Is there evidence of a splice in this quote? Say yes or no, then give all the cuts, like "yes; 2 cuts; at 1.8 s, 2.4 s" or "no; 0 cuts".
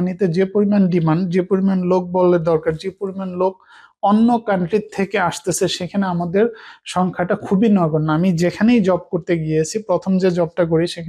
no; 0 cuts